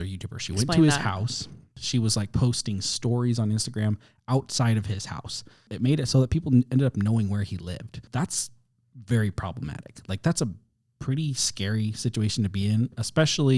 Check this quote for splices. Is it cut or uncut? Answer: cut